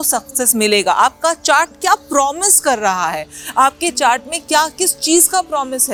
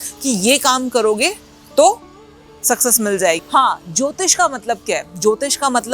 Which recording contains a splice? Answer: second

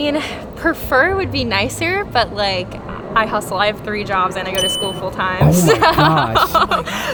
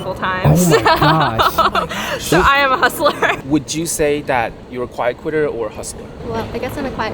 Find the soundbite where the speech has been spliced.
second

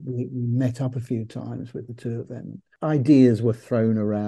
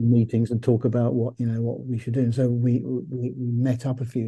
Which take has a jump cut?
first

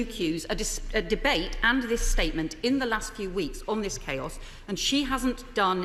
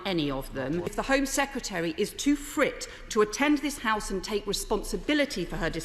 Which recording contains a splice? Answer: second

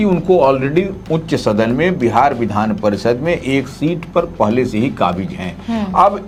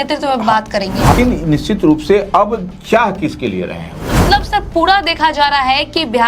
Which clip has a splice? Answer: second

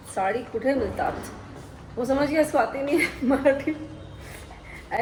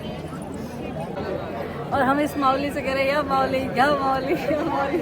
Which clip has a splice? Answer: second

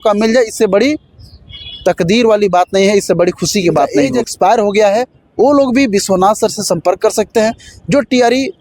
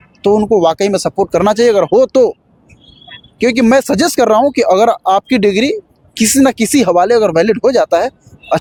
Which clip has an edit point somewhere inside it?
first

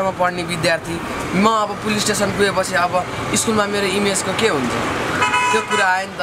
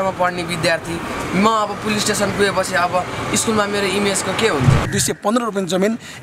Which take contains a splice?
second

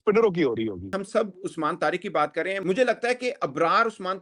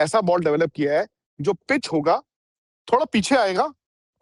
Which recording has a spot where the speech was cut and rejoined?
first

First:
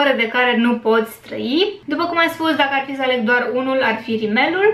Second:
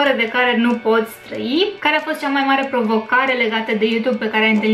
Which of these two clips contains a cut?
second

